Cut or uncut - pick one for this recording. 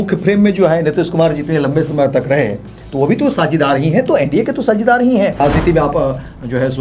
cut